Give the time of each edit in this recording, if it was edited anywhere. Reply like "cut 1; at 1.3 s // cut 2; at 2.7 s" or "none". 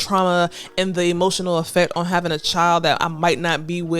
none